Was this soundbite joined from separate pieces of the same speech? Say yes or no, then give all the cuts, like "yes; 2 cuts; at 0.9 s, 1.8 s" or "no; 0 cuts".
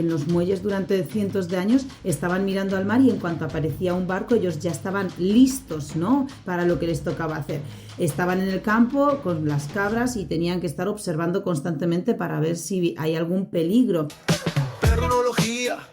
yes; 1 cut; at 14.2 s